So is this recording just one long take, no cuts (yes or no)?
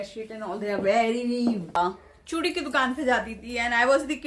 no